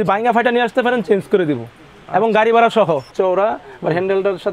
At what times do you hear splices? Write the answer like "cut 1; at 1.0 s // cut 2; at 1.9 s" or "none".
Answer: cut 1; at 3.1 s

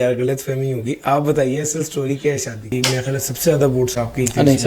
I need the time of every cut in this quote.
cut 1; at 2.7 s

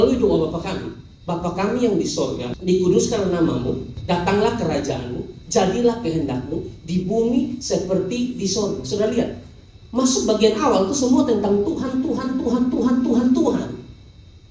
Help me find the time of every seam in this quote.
cut 1; at 2.5 s // cut 2; at 3.9 s

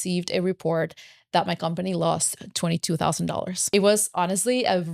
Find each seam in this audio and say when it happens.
cut 1; at 3.6 s

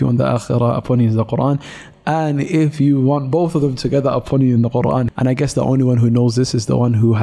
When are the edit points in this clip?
cut 1; at 5.1 s

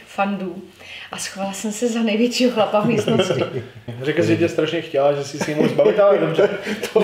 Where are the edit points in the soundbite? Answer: cut 1; at 3.9 s

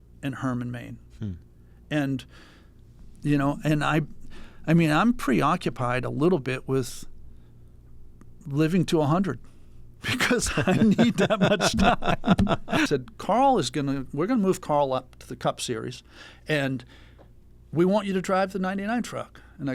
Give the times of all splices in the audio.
cut 1; at 12.9 s

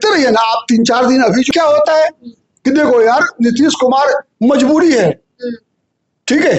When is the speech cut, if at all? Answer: cut 1; at 1.5 s

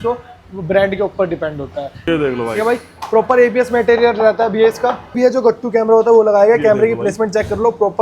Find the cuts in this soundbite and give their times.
cut 1; at 2.0 s // cut 2; at 5.1 s

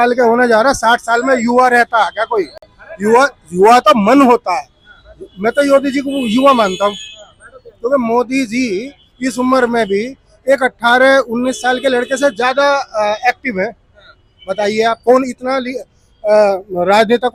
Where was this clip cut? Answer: none

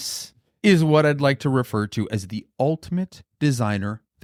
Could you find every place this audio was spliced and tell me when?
none

